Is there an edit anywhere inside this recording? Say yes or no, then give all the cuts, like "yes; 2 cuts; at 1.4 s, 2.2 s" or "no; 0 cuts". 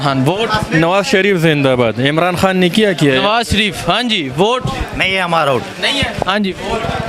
no; 0 cuts